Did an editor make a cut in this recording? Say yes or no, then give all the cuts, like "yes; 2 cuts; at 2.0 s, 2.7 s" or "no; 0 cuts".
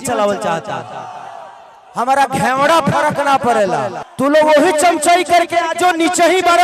yes; 1 cut; at 4.0 s